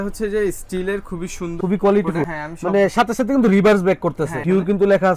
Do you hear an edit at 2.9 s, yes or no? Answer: no